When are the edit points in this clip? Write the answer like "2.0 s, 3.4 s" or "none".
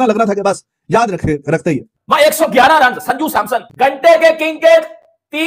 1.9 s, 3.7 s